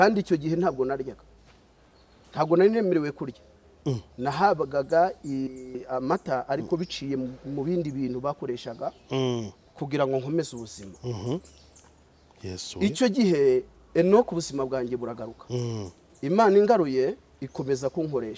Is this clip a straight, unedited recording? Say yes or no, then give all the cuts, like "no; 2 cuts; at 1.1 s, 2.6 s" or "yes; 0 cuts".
yes; 0 cuts